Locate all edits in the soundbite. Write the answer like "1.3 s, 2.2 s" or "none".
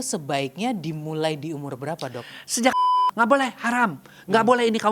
2.7 s

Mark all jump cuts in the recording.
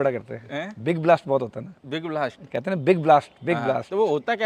none

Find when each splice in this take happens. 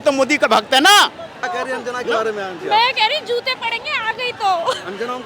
1.4 s

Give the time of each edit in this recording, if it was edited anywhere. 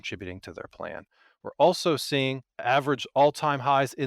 2.5 s

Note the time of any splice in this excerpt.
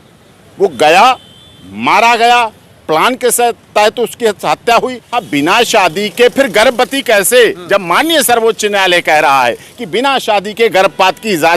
5.1 s

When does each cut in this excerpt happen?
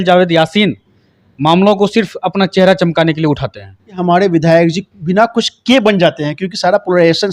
3.8 s

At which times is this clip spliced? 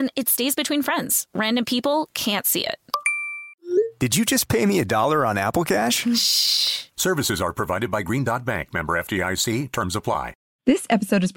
10.4 s

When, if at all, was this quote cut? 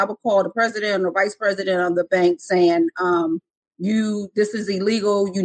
none

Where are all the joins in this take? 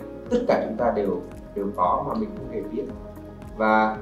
1.4 s

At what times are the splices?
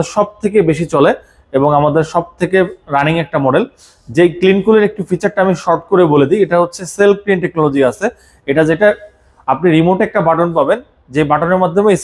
none

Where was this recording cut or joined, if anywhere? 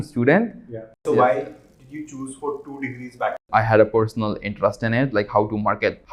1.0 s, 3.4 s

